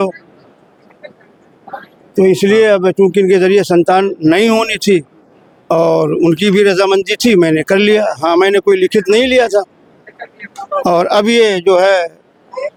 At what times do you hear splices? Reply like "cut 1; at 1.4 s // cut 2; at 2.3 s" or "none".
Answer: none